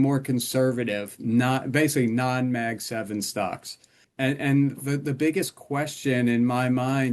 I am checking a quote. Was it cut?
yes; 1 cut; at 4.0 s

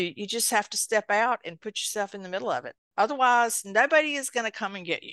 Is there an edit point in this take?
yes; 1 cut; at 2.8 s

